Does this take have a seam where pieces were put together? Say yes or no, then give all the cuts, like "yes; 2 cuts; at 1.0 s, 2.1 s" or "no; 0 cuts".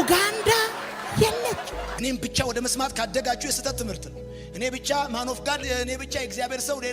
yes; 1 cut; at 2.0 s